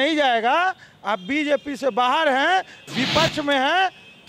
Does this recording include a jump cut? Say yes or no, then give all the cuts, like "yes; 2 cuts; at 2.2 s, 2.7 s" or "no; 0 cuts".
no; 0 cuts